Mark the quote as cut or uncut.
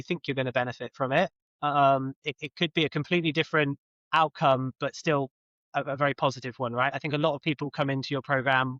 uncut